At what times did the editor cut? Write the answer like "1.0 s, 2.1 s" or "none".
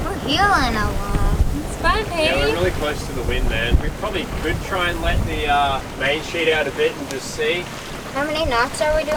none